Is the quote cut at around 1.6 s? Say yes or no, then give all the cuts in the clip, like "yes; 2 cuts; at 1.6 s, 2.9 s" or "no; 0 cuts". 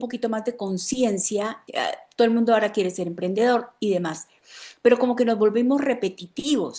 yes; 1 cut; at 1.6 s